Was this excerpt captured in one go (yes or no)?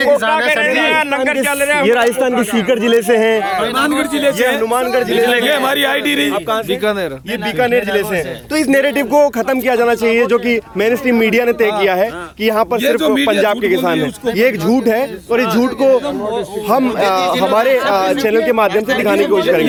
yes